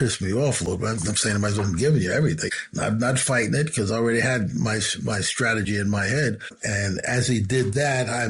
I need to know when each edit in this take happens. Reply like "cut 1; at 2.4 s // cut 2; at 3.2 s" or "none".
cut 1; at 2.4 s // cut 2; at 6.6 s